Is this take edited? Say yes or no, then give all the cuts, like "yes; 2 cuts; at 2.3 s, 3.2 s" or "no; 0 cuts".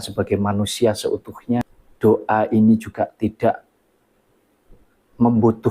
yes; 1 cut; at 1.8 s